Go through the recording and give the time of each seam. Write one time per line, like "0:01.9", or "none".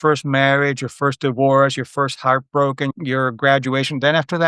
0:02.9